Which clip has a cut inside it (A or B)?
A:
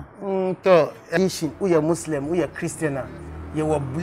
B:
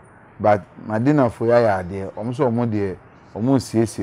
A